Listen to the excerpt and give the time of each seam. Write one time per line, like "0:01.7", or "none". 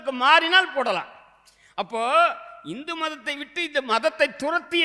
none